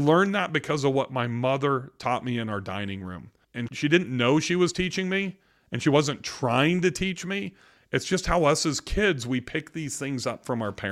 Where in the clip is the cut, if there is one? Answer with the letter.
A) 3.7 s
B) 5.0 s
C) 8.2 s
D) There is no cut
A